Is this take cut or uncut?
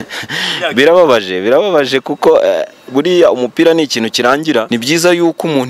cut